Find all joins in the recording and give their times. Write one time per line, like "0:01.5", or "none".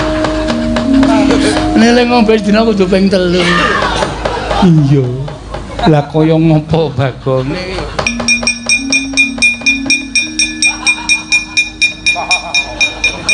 none